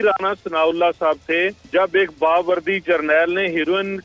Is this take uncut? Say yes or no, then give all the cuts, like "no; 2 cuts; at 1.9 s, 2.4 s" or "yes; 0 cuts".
no; 1 cut; at 1.6 s